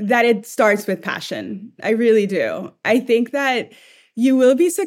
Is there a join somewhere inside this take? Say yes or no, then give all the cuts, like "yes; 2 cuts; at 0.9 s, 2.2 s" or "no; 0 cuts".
no; 0 cuts